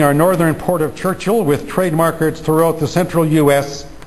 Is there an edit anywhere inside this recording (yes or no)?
no